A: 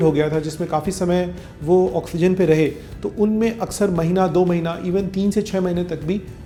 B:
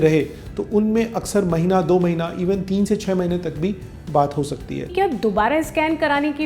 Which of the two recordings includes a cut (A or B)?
B